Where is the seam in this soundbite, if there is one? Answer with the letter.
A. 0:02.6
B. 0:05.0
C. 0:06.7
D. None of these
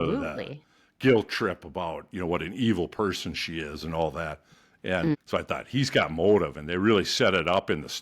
B